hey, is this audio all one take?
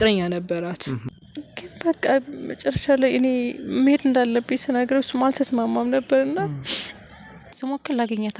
no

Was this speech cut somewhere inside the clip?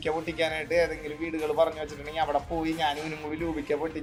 no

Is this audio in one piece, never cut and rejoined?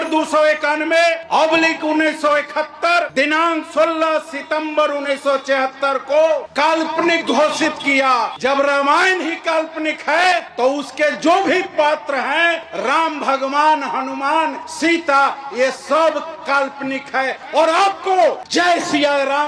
no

